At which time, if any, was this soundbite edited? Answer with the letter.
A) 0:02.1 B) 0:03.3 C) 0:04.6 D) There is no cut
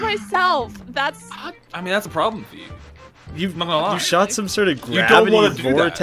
A